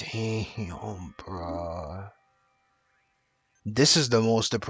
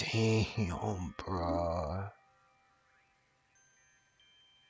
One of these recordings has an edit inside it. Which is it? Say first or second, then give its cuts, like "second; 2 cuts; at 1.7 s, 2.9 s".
first; 1 cut; at 3.5 s